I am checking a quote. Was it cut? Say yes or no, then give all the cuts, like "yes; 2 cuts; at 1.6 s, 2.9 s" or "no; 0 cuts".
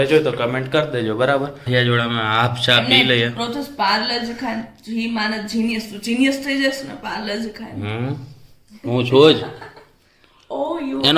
yes; 1 cut; at 1.6 s